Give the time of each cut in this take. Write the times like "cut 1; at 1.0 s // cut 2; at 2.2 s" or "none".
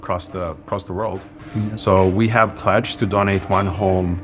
cut 1; at 1.4 s